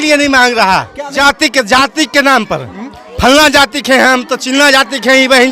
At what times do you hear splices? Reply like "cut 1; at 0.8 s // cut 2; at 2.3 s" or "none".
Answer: cut 1; at 1.1 s